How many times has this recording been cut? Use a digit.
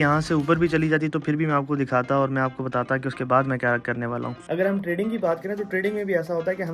1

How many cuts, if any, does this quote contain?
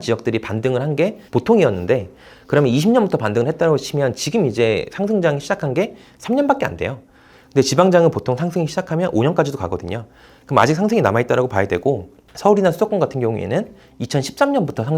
1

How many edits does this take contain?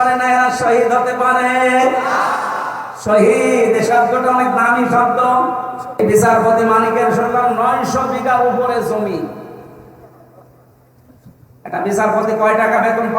1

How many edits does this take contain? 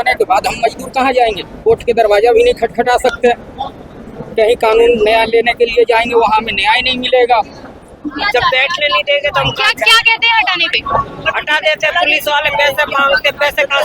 1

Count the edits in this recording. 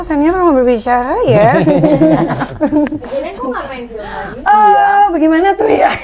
0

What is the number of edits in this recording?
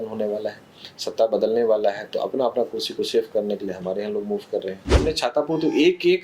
1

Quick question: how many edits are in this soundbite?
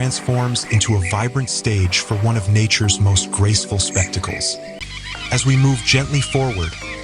1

